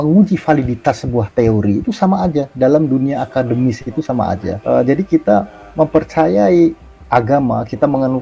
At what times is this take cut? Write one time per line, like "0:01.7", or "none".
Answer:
0:04.5